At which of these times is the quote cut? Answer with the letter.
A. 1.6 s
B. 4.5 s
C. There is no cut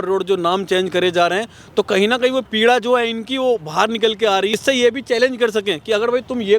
B